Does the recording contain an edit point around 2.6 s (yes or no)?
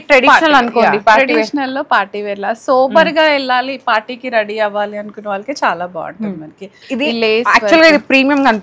no